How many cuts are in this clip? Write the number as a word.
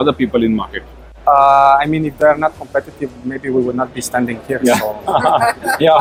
zero